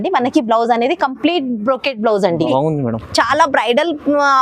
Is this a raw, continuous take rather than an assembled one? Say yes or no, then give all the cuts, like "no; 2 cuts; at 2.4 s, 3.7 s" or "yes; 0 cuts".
no; 1 cut; at 2.5 s